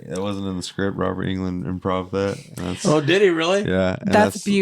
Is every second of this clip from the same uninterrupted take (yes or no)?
yes